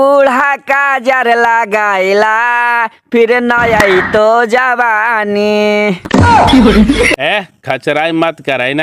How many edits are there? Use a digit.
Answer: 0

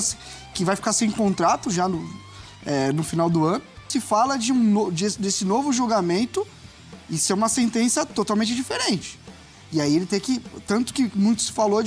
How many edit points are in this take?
1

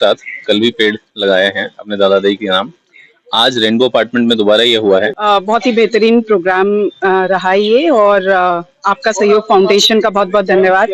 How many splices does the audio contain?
1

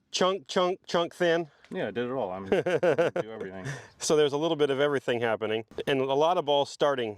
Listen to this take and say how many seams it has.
1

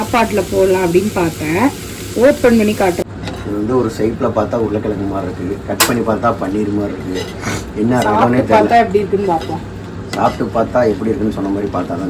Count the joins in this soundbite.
1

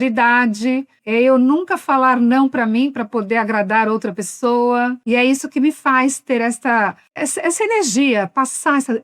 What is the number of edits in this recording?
1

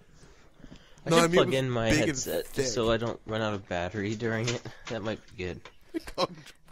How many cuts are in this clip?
0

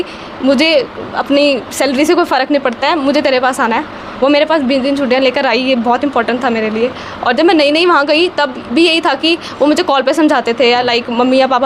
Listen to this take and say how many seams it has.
0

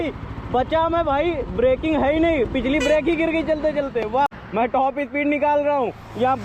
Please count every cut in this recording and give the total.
1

